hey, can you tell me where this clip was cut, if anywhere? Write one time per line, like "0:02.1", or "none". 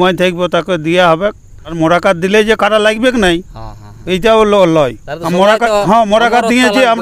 0:01.7